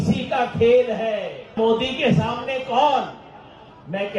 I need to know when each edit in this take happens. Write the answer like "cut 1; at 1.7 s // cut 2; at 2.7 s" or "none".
cut 1; at 1.6 s